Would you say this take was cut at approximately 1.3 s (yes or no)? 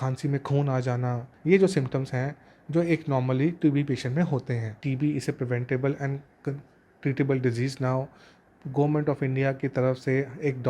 yes